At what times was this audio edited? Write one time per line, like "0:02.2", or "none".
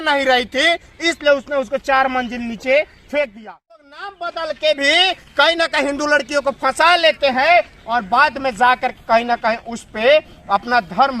0:03.8

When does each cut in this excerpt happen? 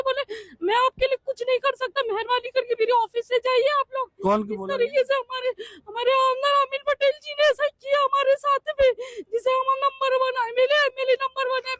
none

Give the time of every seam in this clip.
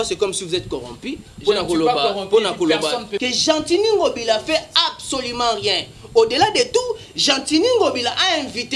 0:03.1

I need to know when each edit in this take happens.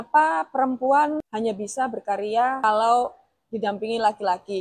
0:01.3
0:02.6

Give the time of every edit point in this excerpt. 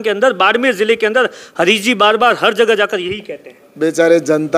none

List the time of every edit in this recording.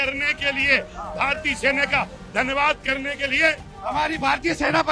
0:03.7

